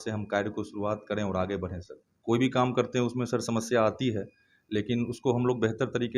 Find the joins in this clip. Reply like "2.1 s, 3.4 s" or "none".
2.1 s